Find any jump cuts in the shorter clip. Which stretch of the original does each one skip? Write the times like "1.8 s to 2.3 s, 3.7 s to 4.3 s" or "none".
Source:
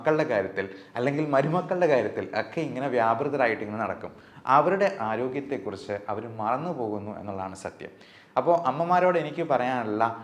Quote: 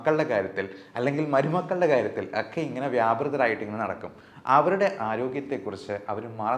none